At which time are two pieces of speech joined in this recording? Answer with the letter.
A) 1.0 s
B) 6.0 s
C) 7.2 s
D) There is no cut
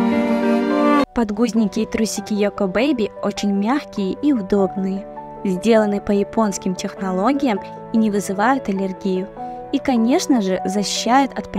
A